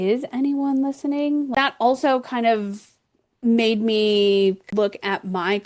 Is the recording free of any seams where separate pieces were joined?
no; 2 cuts; at 1.5 s, 4.7 s

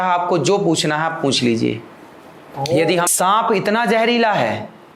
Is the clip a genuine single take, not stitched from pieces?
no; 1 cut; at 3.1 s

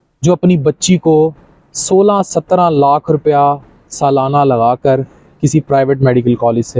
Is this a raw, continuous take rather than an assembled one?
yes; 0 cuts

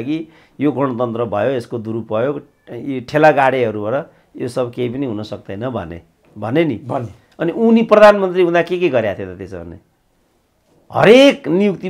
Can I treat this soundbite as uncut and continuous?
yes; 0 cuts

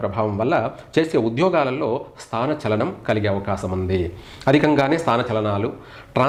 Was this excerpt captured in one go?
yes; 0 cuts

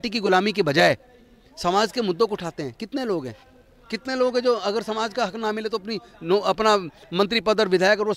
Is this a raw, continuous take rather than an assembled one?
yes; 0 cuts

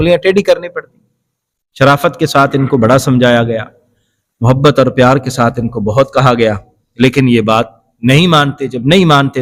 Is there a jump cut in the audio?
no; 0 cuts

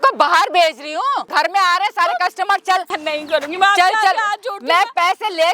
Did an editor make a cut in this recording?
yes; 2 cuts; at 1.3 s, 2.9 s

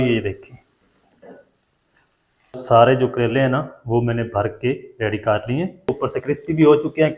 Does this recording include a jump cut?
yes; 2 cuts; at 2.6 s, 5.9 s

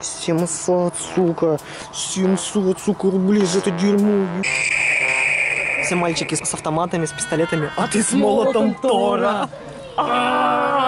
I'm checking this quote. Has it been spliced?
yes; 2 cuts; at 4.4 s, 6.4 s

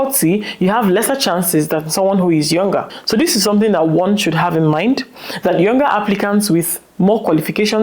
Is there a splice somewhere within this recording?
no; 0 cuts

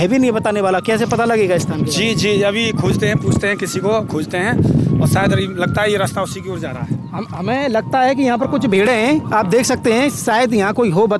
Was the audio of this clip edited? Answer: no; 0 cuts

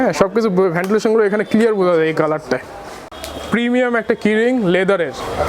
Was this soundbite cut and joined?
yes; 1 cut; at 3.0 s

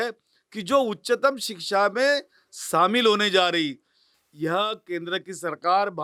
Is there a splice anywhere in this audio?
no; 0 cuts

